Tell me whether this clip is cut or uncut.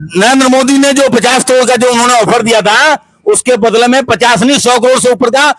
uncut